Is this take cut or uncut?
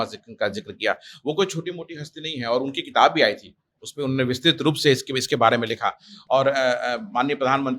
uncut